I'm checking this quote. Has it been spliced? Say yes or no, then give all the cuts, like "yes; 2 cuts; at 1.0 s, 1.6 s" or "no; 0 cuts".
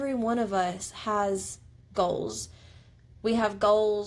no; 0 cuts